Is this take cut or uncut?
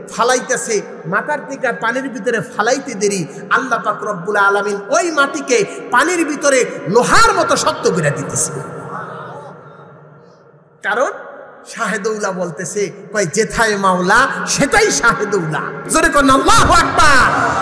cut